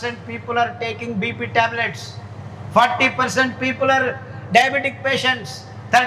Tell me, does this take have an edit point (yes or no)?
no